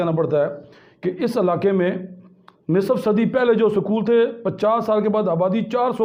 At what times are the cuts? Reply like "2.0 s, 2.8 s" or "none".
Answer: none